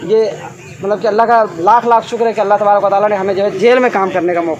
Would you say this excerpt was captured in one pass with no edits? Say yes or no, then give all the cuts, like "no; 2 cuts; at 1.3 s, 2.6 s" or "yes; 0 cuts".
yes; 0 cuts